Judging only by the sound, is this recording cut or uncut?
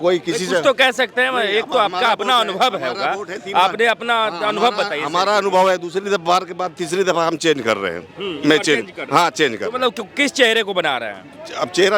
uncut